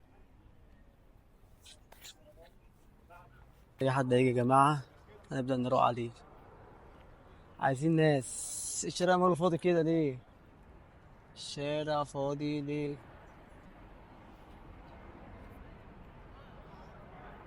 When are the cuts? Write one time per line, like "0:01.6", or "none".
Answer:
0:03.7